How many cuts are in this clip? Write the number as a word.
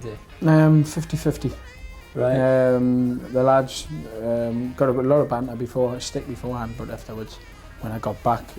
zero